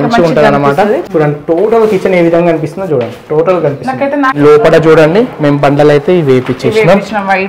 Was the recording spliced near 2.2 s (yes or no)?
no